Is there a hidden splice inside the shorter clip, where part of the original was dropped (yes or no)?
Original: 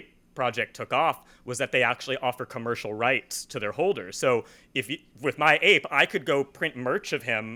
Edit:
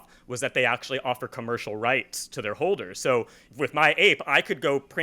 yes